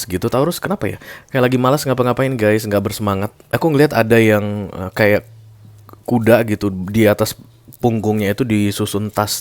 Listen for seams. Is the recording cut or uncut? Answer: cut